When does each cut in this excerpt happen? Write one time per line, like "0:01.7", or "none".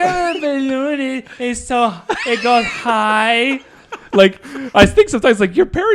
none